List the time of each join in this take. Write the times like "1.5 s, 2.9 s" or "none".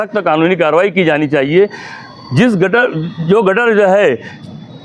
none